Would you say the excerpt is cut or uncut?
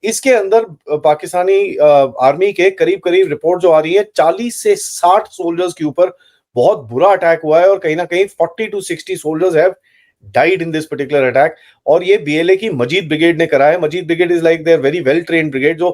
uncut